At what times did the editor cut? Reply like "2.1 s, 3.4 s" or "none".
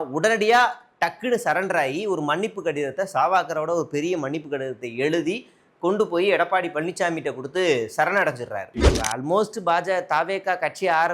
9.0 s